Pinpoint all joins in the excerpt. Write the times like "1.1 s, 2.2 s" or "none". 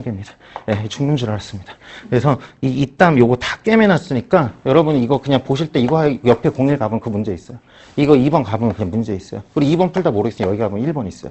none